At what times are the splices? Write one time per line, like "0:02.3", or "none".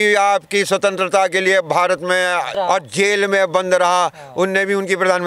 0:02.5